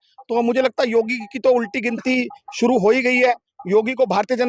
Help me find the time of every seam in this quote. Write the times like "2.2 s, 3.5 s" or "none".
none